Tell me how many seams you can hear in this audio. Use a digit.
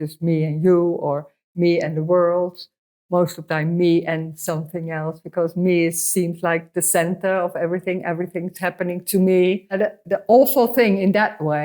1